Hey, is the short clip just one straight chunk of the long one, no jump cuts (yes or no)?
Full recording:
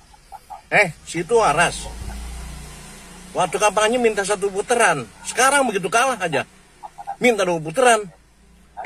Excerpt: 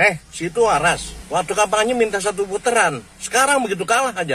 no